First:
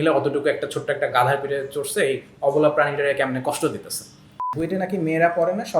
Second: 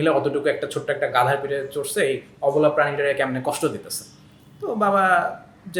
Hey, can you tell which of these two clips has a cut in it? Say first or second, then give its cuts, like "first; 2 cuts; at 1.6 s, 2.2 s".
first; 1 cut; at 4.5 s